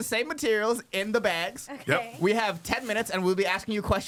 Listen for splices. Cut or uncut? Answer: uncut